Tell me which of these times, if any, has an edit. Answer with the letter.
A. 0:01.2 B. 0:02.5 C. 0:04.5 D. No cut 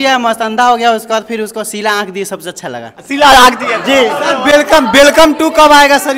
D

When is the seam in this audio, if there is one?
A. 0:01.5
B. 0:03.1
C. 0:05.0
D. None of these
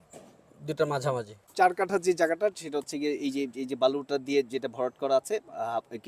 A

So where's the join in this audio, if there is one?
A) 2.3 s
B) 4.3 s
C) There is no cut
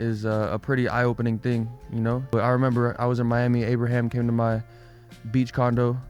A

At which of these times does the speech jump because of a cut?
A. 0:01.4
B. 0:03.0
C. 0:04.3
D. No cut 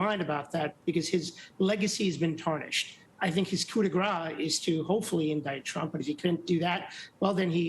B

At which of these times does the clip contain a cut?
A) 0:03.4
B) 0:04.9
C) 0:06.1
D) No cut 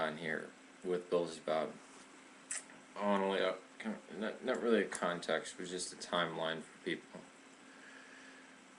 C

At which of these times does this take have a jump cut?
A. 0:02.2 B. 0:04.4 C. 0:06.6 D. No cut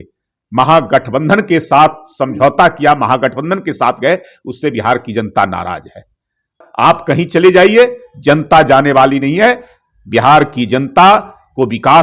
C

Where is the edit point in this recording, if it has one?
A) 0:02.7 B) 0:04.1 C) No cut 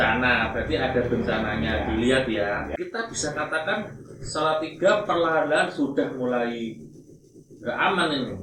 A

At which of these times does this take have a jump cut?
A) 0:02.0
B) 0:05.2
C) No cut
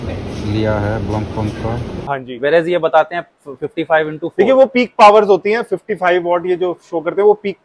A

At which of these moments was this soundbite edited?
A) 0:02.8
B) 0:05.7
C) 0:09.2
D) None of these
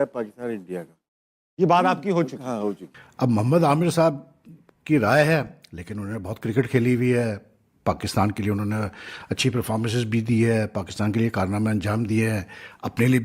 A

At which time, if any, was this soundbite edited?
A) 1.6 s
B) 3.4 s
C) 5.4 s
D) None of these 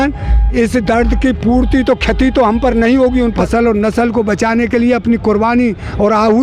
B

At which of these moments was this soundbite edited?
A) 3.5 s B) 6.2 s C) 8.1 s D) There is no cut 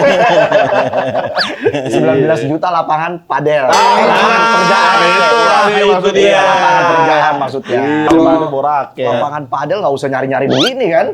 C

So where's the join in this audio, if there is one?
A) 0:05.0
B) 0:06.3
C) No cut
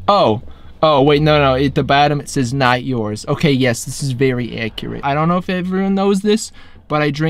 A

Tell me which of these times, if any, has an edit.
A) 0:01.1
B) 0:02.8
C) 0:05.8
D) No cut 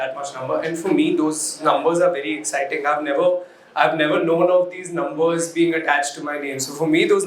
D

